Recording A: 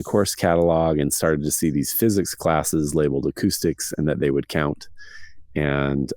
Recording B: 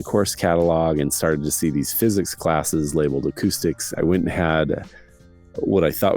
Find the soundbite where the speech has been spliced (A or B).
B